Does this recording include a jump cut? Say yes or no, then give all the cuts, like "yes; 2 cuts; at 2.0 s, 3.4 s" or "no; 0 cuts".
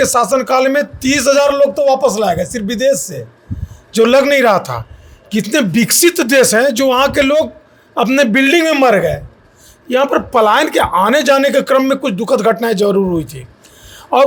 no; 0 cuts